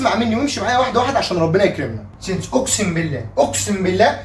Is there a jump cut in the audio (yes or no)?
yes